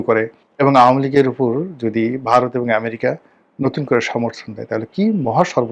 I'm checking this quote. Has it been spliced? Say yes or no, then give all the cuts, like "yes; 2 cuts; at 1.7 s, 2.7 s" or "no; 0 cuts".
no; 0 cuts